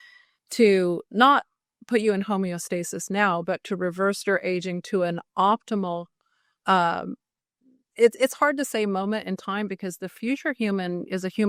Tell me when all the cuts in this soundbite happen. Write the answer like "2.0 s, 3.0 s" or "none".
none